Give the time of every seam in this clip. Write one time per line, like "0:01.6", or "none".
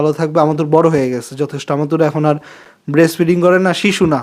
none